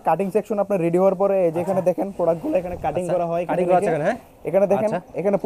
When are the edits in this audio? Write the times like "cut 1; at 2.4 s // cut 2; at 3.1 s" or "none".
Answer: none